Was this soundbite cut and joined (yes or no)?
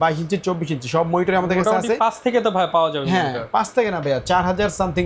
no